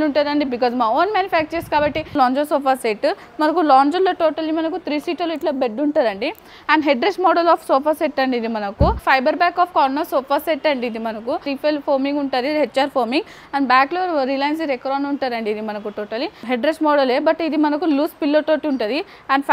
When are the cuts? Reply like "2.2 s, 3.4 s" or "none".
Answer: 2.1 s, 9.0 s, 11.5 s, 16.4 s